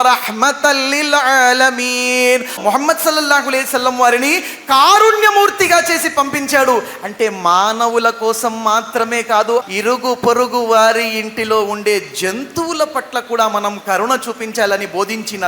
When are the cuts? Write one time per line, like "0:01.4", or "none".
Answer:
0:02.6
0:09.6